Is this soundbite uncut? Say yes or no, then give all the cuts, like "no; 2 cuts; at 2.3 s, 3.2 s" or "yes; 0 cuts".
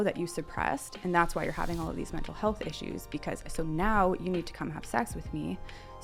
yes; 0 cuts